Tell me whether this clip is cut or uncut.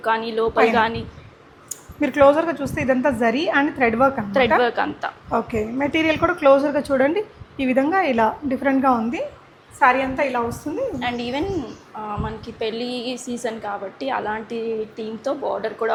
uncut